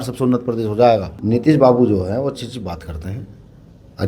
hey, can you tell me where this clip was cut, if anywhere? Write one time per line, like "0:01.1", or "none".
0:01.1